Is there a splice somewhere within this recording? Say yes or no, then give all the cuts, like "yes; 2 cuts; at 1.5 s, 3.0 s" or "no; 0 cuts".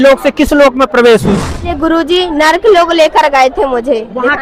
yes; 1 cut; at 1.7 s